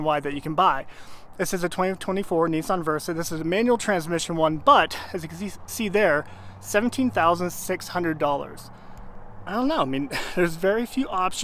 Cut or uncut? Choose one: uncut